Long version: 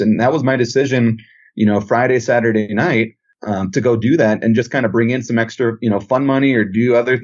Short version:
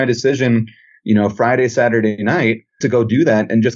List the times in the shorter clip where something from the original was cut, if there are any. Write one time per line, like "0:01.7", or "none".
0:02.2

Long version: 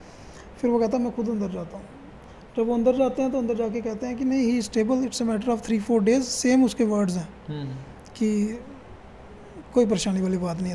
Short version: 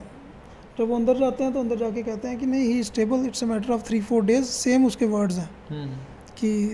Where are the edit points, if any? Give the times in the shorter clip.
none

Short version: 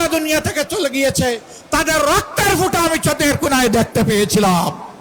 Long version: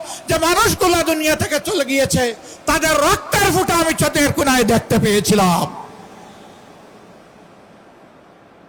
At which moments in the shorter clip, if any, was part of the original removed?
none

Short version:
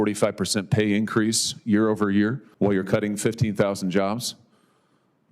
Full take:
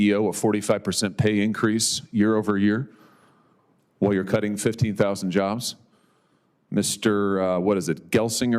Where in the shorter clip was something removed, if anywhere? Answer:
0:02.4

